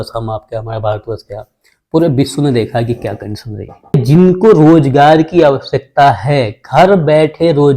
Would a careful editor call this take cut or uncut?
cut